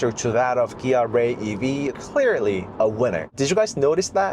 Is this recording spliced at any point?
yes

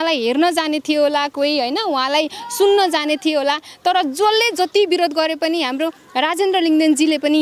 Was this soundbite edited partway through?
no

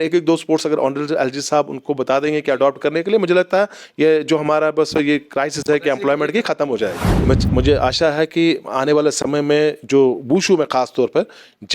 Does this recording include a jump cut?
yes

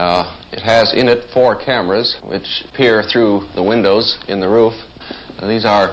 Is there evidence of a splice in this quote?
no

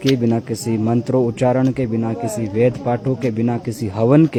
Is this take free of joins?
yes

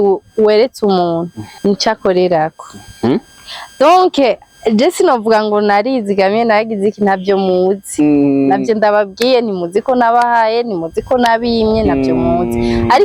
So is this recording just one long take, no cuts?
no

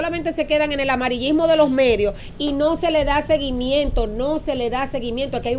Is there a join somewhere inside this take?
no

